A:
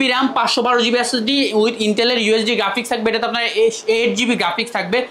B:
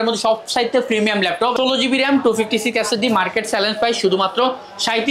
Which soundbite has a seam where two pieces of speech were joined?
B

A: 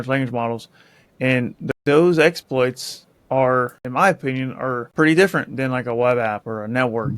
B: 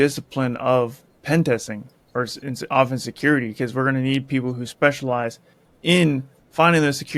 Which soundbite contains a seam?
A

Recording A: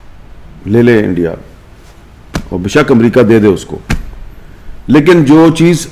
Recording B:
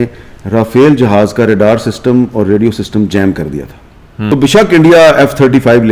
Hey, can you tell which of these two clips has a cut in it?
B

